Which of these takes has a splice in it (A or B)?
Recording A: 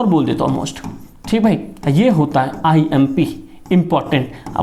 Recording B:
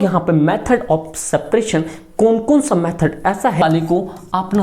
B